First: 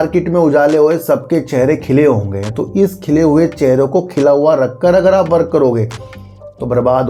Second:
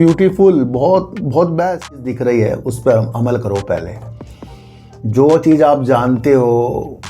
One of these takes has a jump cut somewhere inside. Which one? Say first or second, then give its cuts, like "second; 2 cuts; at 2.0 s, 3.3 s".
second; 1 cut; at 2.1 s